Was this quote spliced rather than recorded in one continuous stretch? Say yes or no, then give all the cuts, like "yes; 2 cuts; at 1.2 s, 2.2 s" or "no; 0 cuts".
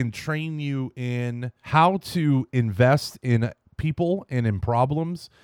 yes; 1 cut; at 1.5 s